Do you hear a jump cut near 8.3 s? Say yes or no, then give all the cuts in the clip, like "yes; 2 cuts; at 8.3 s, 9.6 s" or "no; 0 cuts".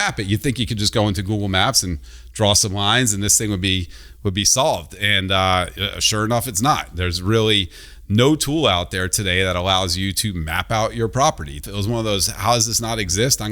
no; 1 cut; at 11.7 s